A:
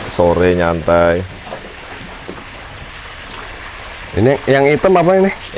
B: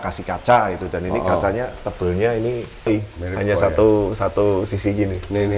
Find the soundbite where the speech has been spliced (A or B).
B